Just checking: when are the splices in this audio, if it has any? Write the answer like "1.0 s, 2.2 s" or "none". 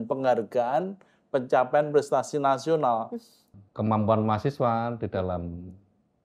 3.5 s